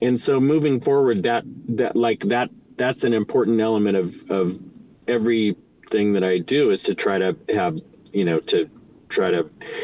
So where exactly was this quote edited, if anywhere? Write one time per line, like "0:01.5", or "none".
none